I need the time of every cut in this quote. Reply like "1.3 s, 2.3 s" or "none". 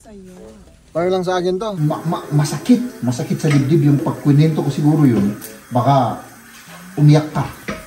1.8 s, 4.0 s